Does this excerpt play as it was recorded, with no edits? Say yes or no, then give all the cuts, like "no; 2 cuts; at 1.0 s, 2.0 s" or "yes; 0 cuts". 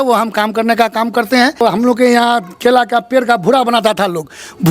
no; 1 cut; at 1.6 s